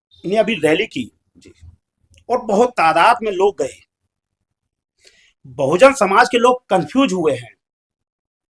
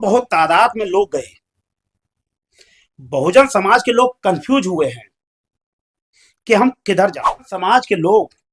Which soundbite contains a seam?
second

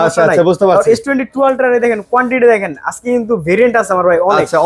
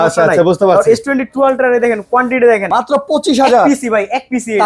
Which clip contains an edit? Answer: second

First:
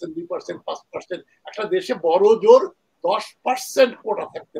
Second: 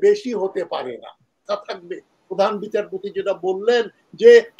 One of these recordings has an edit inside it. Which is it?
second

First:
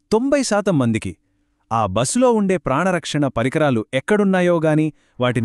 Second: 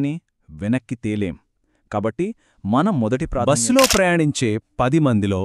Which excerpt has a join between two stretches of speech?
second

